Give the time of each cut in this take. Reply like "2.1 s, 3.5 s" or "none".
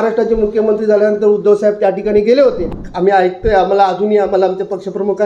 2.7 s